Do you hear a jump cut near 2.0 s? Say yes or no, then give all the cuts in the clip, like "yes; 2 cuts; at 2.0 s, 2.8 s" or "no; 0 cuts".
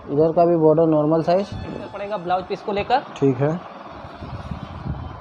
yes; 1 cut; at 2.0 s